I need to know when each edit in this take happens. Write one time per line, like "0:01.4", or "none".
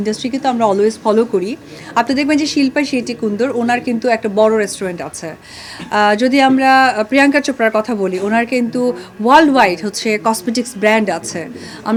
none